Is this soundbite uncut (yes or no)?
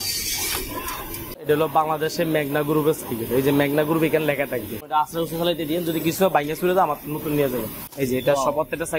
no